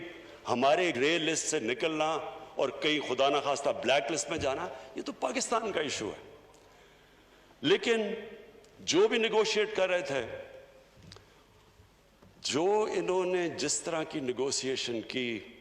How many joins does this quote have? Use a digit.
1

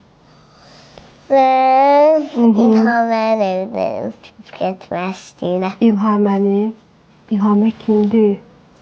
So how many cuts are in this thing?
0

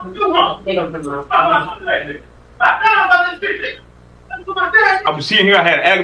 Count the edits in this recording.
1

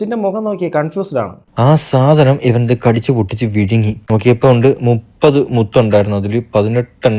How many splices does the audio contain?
1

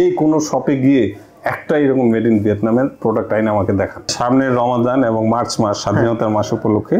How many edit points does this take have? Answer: 1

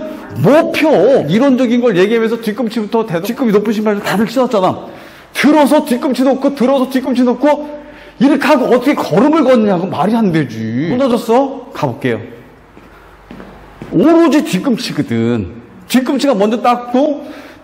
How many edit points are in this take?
3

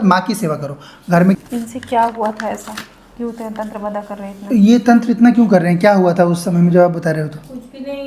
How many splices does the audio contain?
1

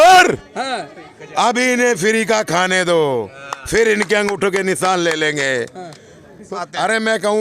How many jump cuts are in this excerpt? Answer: 1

